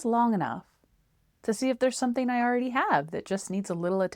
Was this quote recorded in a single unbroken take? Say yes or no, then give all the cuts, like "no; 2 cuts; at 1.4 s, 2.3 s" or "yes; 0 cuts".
yes; 0 cuts